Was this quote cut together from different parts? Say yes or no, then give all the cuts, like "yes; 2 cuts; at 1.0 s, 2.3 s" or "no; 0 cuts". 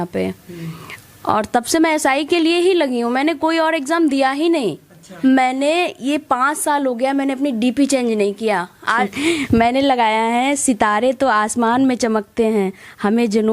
yes; 2 cuts; at 5.0 s, 9.1 s